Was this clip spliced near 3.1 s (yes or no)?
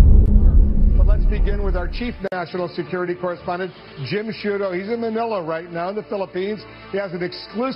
no